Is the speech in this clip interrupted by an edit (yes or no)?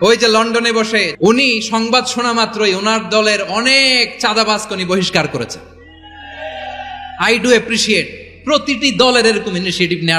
yes